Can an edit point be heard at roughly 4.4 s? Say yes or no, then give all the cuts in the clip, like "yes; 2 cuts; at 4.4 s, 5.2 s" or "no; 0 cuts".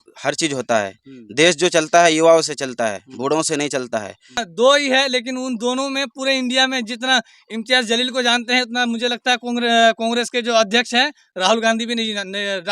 yes; 1 cut; at 4.4 s